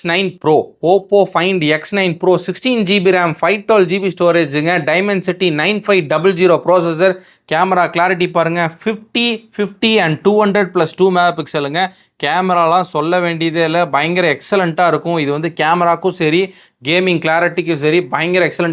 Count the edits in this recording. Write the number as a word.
zero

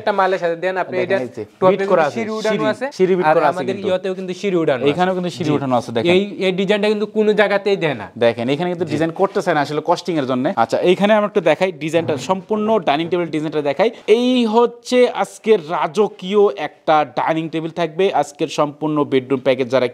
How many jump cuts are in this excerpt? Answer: zero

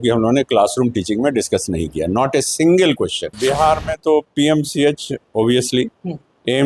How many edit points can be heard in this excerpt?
one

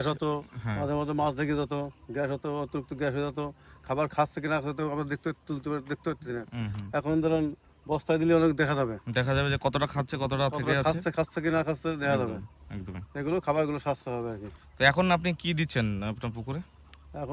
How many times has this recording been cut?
zero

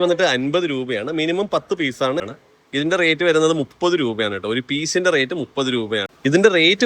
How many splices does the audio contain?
two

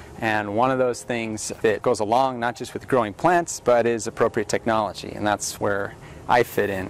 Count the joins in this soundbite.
one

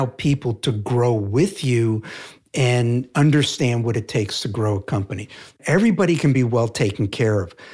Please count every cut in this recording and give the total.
two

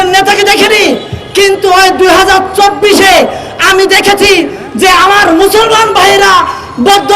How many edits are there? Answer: zero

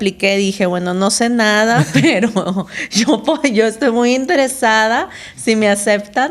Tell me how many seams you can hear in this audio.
zero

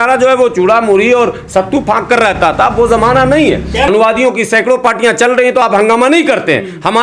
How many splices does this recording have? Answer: one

